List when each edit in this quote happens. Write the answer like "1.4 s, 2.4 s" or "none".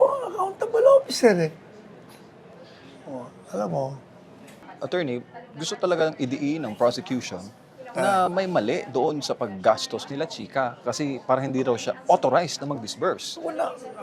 4.7 s